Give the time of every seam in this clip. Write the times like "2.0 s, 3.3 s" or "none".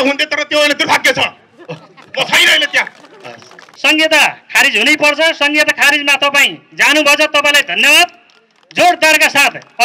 3.7 s